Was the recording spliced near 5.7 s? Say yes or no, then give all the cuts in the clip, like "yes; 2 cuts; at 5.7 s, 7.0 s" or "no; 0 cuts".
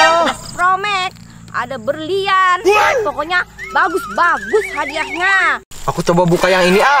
yes; 1 cut; at 5.7 s